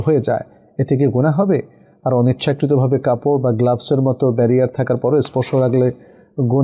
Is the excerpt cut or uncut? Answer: uncut